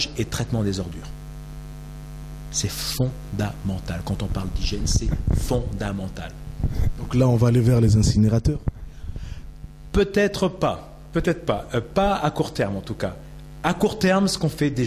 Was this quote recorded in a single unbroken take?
yes; 0 cuts

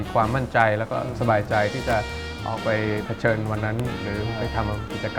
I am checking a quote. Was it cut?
no; 0 cuts

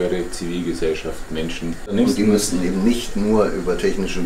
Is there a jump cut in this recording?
yes; 1 cut; at 1.9 s

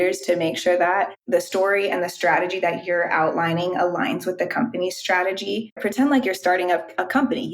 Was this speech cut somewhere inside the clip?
yes; 1 cut; at 5.8 s

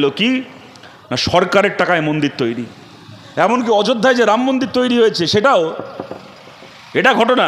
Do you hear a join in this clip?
no; 0 cuts

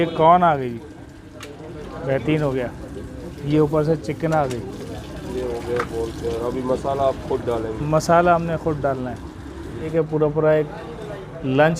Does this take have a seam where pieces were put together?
yes; 1 cut; at 9.9 s

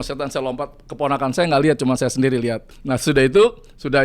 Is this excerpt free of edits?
no; 1 cut; at 2.7 s

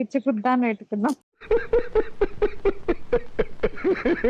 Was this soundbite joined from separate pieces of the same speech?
no; 0 cuts

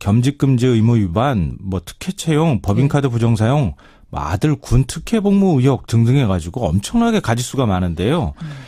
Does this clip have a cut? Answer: no; 0 cuts

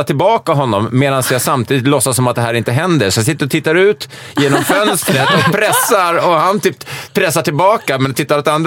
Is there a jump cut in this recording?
no; 0 cuts

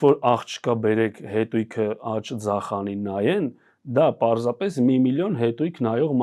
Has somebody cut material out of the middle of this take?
no; 0 cuts

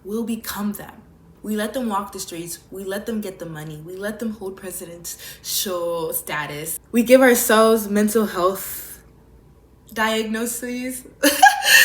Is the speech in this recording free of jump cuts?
no; 3 cuts; at 1.3 s, 6.7 s, 9.4 s

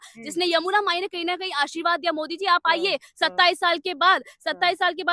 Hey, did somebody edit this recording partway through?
no; 0 cuts

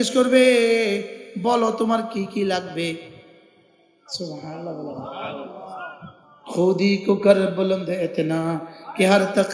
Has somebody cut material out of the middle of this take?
no; 0 cuts

